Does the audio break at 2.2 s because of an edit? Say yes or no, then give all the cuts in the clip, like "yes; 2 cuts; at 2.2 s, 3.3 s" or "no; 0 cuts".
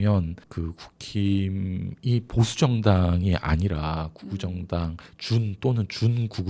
no; 0 cuts